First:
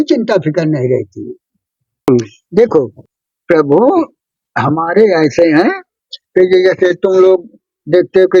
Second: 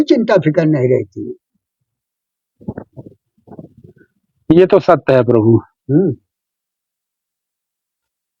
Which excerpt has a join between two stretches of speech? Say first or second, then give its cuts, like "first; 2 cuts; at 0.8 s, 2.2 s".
first; 1 cut; at 2.1 s